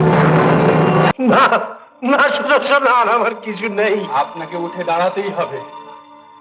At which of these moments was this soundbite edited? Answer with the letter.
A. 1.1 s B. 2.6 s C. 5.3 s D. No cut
A